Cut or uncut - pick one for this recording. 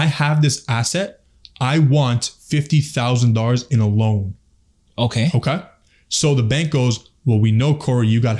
uncut